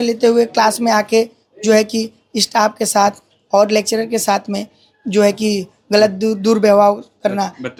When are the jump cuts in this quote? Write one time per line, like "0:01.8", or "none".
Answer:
none

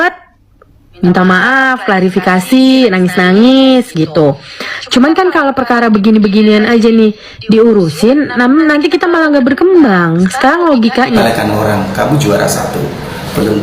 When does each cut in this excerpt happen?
0:11.2

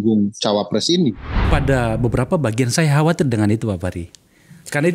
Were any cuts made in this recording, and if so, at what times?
0:01.5

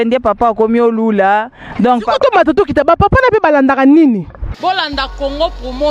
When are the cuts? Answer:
0:04.6

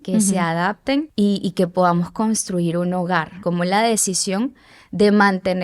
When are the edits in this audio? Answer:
0:01.1
0:03.4

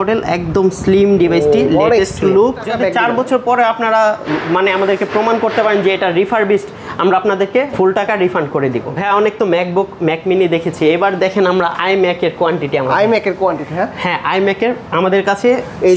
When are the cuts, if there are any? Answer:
0:02.7
0:07.7
0:08.9

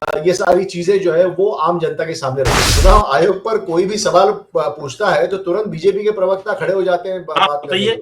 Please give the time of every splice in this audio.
0:02.6

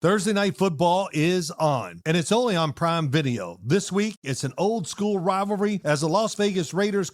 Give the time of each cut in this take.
none

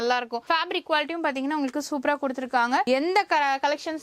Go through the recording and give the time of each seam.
0:02.9

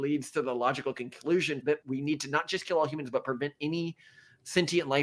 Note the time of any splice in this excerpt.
0:01.8

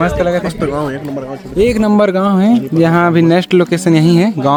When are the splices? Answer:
none

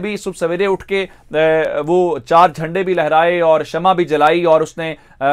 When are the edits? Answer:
none

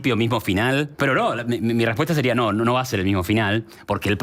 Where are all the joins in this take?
0:00.9

